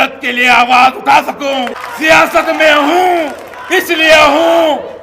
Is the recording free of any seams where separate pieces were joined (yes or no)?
no